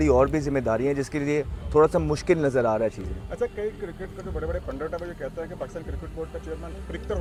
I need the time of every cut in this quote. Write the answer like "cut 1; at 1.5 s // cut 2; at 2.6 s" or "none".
none